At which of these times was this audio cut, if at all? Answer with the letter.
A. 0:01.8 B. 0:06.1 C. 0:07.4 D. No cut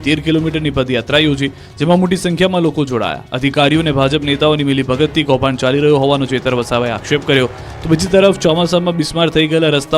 C